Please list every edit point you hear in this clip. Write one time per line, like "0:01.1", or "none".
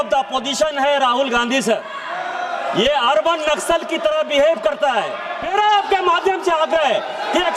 0:05.4

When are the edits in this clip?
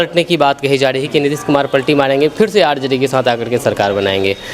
none

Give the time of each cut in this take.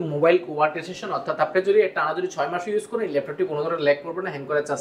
none

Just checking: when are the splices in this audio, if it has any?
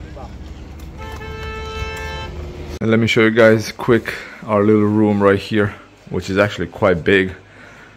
0:02.8

